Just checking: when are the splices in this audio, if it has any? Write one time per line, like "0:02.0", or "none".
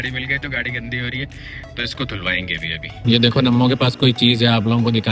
0:02.9